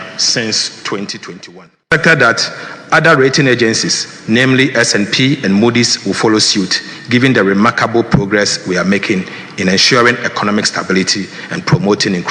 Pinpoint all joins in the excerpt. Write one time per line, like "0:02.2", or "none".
0:01.9